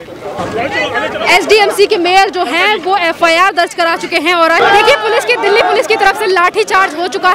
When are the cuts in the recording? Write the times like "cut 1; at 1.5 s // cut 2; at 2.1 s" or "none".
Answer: cut 1; at 4.6 s